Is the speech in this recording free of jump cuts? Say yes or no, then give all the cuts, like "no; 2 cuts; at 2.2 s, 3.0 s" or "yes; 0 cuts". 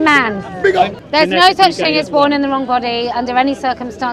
no; 1 cut; at 1.0 s